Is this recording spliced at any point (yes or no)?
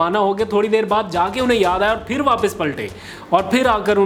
no